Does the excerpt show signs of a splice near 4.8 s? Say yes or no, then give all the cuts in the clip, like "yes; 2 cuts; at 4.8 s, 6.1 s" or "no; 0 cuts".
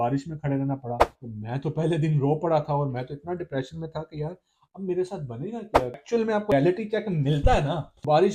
no; 2 cuts; at 1.1 s, 6.0 s